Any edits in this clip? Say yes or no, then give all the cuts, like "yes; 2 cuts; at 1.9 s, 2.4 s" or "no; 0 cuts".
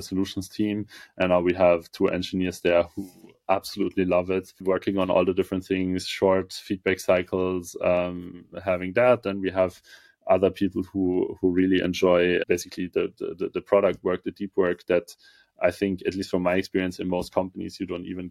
yes; 2 cuts; at 4.5 s, 12.4 s